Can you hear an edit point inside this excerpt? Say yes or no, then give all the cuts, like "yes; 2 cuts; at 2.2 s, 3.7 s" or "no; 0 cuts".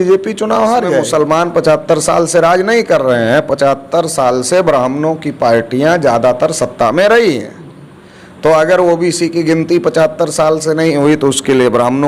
yes; 1 cut; at 1.1 s